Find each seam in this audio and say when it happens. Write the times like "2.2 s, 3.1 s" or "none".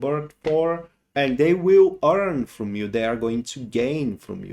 0.9 s